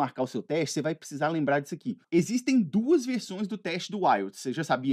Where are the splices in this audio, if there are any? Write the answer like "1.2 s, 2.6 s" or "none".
2.0 s